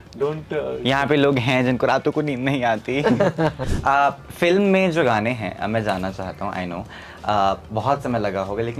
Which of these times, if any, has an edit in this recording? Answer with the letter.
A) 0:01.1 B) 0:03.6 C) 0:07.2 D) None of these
B